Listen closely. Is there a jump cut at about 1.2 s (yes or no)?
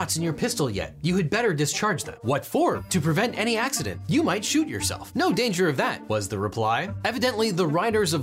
no